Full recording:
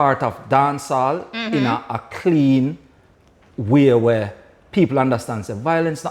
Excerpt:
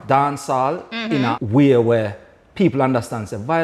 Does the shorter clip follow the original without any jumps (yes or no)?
no